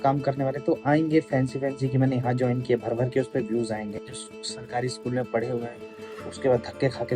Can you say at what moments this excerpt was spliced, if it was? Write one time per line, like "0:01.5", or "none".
0:04.3